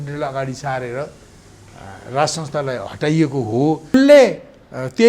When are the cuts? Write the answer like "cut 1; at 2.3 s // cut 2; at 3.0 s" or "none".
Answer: cut 1; at 3.9 s